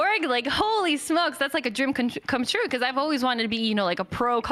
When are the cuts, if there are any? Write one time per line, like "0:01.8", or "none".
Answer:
none